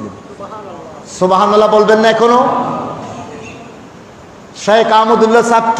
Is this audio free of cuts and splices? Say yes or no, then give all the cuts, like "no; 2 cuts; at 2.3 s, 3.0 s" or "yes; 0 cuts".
yes; 0 cuts